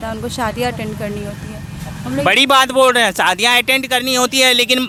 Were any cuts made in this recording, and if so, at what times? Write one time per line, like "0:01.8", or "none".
none